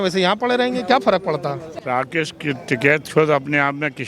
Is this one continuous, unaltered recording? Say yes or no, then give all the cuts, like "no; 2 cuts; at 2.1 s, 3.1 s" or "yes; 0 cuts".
no; 1 cut; at 1.7 s